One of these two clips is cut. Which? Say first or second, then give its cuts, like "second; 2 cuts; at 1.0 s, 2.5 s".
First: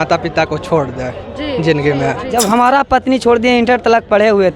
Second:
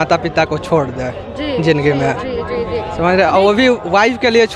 first; 1 cut; at 2.3 s